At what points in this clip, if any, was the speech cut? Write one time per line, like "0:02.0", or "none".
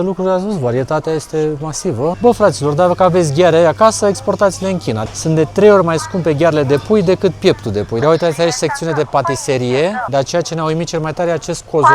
0:02.2
0:05.0
0:08.0
0:10.0